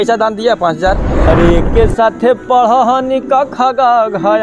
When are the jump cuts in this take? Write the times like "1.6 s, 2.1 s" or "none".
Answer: 1.1 s